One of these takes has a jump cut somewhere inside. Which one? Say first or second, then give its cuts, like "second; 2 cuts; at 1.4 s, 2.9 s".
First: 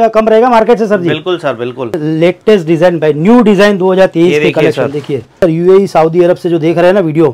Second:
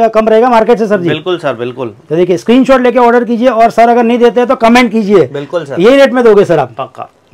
first; 2 cuts; at 2.0 s, 5.4 s